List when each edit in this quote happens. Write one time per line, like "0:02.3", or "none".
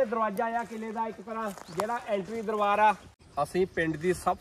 0:03.1